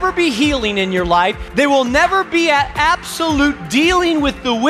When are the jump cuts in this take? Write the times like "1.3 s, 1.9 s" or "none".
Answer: 1.4 s